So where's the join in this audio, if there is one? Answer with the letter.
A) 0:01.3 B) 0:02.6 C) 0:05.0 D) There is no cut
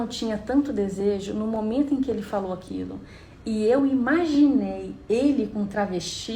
D